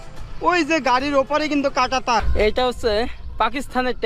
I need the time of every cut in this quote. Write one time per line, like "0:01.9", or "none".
0:02.3